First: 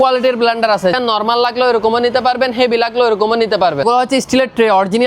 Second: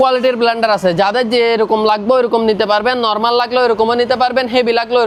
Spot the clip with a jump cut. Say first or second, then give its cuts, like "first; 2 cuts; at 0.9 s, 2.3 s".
first; 2 cuts; at 0.9 s, 3.8 s